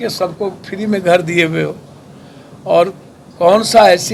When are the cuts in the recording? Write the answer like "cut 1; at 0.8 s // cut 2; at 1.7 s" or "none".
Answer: none